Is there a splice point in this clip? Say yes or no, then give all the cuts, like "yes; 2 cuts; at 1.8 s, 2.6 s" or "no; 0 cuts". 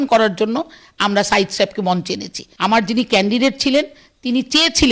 yes; 1 cut; at 2.4 s